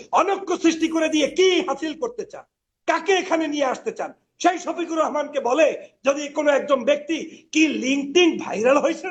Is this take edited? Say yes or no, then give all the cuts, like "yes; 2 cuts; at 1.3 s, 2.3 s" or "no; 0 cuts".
no; 0 cuts